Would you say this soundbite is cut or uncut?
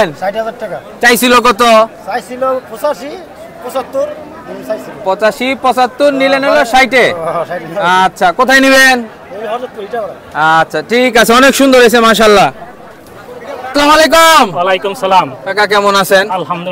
uncut